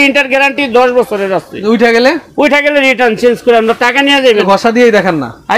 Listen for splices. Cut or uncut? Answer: cut